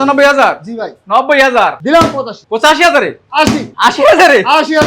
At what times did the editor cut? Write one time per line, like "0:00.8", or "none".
0:02.0
0:03.7